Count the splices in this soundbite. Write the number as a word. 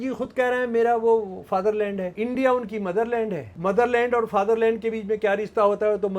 two